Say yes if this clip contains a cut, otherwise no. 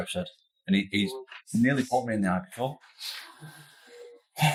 no